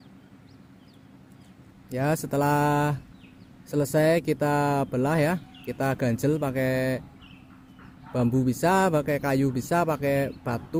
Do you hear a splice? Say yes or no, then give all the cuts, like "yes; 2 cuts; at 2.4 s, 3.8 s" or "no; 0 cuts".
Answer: no; 0 cuts